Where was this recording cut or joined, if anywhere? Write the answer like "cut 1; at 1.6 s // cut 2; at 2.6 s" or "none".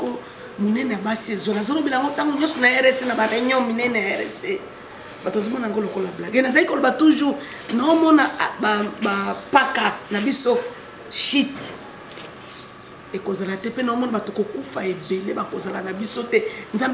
none